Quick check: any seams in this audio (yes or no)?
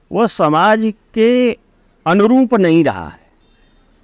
no